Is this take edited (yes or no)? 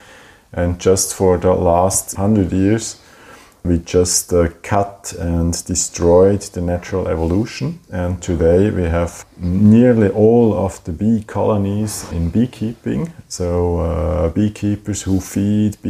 no